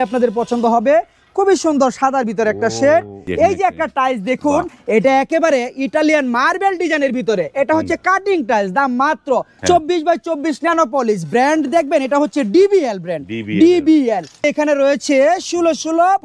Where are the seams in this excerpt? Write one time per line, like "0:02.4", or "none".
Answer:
0:03.2
0:09.5
0:14.4